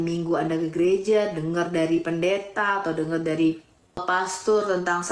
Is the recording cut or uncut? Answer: cut